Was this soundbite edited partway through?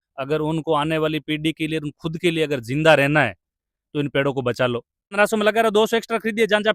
yes; 1 cut; at 5.1 s

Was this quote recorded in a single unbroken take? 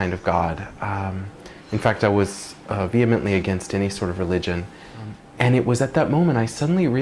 no; 1 cut; at 5.2 s

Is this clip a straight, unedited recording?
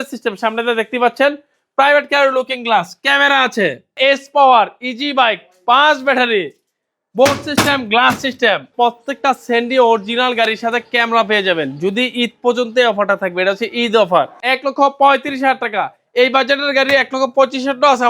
no; 3 cuts; at 4.0 s, 8.7 s, 14.4 s

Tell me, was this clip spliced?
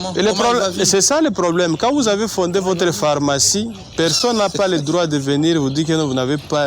no; 0 cuts

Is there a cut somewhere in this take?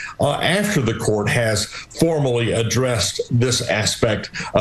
no; 0 cuts

